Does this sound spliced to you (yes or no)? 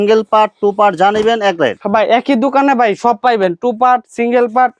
no